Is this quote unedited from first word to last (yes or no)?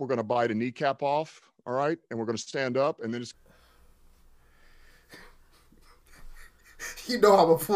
no